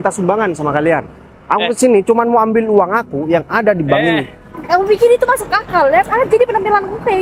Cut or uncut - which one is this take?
uncut